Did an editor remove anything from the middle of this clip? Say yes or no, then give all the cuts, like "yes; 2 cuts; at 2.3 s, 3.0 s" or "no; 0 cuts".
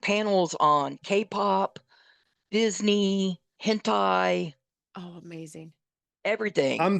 yes; 1 cut; at 3.5 s